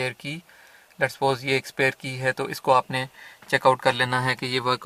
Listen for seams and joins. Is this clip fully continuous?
yes; 0 cuts

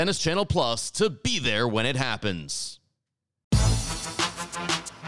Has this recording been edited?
yes; 1 cut; at 3.5 s

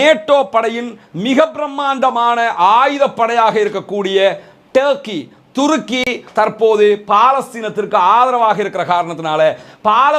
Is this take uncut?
yes; 0 cuts

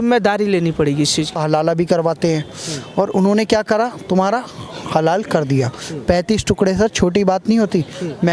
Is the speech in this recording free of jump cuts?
no; 1 cut; at 1.4 s

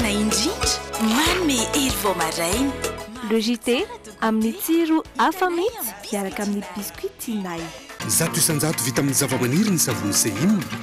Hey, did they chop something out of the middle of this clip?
yes; 1 cut; at 8.0 s

